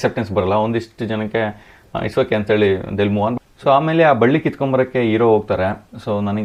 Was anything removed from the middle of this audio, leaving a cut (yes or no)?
no